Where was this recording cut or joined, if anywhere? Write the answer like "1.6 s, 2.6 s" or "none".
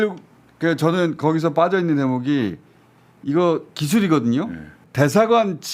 4.8 s